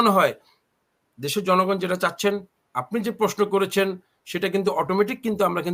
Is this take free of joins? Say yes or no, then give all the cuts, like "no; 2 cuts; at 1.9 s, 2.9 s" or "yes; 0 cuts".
yes; 0 cuts